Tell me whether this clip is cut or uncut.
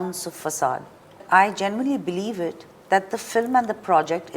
cut